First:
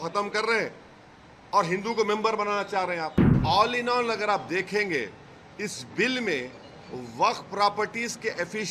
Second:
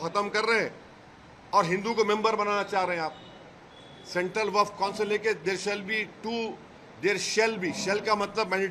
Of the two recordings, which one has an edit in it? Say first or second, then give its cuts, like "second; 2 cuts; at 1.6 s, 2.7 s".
first; 1 cut; at 3.3 s